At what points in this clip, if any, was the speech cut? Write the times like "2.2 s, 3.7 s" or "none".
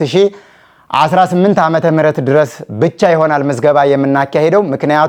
none